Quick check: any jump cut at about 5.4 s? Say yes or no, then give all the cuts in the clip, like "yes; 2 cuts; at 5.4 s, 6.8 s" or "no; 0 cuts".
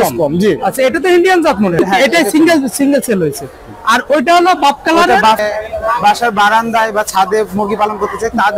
yes; 2 cuts; at 1.8 s, 5.4 s